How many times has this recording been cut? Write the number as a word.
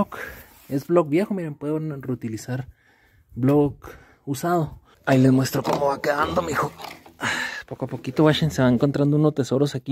one